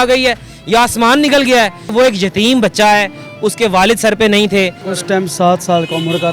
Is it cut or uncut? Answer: cut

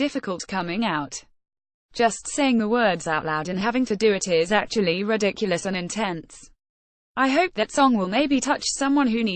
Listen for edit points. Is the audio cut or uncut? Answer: uncut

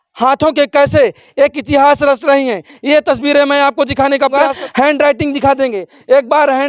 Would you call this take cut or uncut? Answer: cut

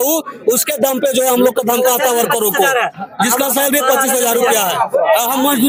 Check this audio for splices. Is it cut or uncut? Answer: uncut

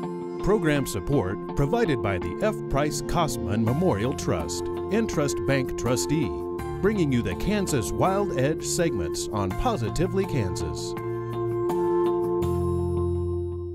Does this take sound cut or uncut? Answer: uncut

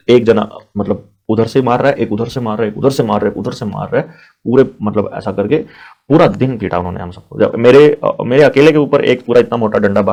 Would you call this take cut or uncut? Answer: uncut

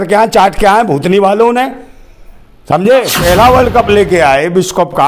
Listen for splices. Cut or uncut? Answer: cut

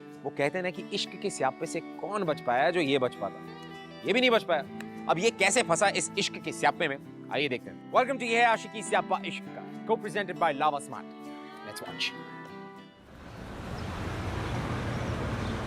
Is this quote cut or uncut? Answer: cut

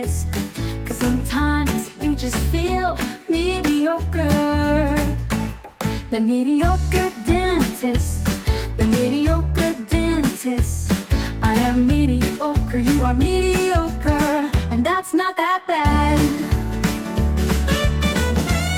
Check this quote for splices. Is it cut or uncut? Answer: uncut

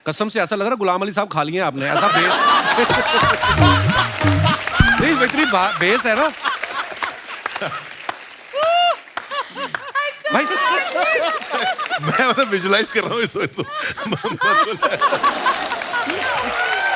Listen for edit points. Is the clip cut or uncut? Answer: uncut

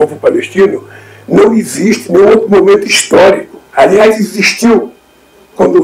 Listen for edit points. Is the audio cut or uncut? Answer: cut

